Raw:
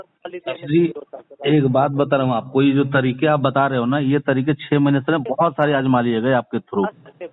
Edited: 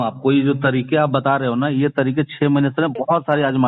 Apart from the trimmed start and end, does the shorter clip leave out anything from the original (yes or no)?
no